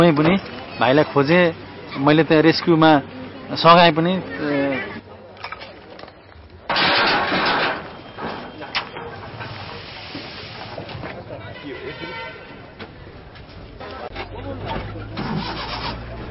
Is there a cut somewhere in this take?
no; 0 cuts

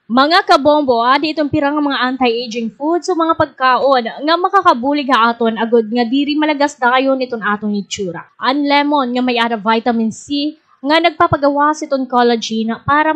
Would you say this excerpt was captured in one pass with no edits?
no; 1 cut; at 1.0 s

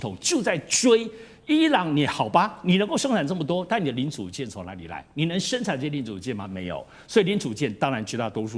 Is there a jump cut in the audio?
no; 0 cuts

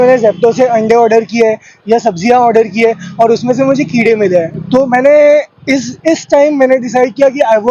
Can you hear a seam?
no; 0 cuts

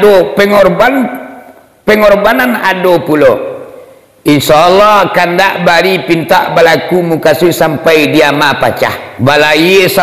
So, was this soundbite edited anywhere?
yes; 1 cut; at 9.1 s

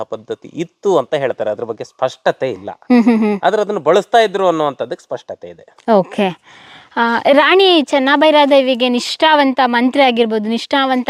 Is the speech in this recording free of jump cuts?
yes; 0 cuts

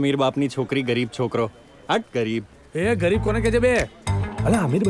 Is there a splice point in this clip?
no; 0 cuts

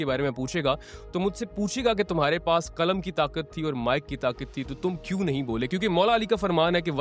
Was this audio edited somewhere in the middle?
no; 0 cuts

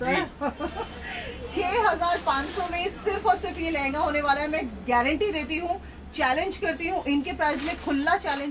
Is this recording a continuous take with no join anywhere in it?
yes; 0 cuts

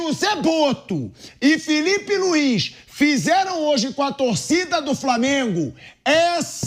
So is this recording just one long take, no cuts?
yes; 0 cuts

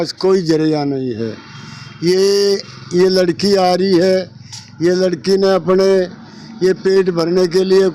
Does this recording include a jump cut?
no; 0 cuts

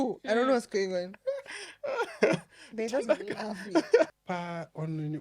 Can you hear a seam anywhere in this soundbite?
yes; 1 cut; at 4.2 s

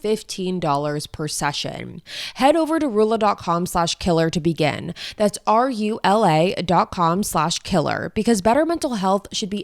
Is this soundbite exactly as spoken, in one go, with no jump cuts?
no; 1 cut; at 2.1 s

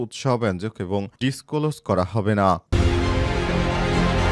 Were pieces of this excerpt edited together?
yes; 2 cuts; at 1.1 s, 2.7 s

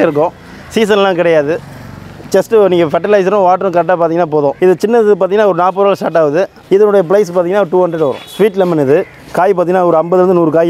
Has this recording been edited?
no; 0 cuts

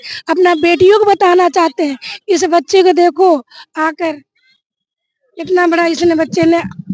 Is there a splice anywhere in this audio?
no; 0 cuts

